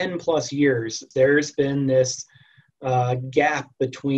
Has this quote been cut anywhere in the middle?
yes; 1 cut; at 1.0 s

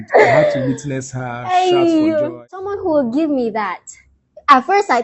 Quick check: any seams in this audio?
yes; 1 cut; at 2.7 s

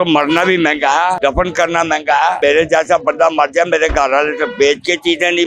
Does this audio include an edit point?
yes; 2 cuts; at 1.2 s, 2.4 s

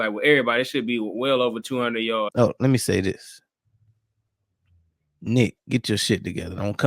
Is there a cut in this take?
yes; 1 cut; at 2.3 s

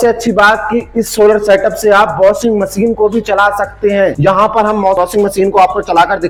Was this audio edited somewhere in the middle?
no; 0 cuts

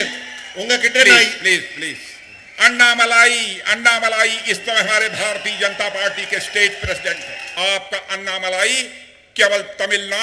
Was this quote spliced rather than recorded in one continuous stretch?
yes; 1 cut; at 7.4 s

